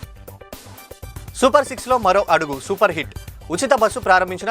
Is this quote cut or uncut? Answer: cut